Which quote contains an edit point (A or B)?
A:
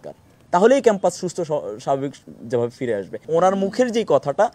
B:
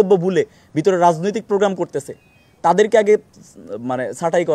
A